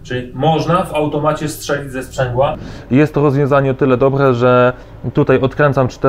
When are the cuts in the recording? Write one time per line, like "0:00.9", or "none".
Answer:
0:02.7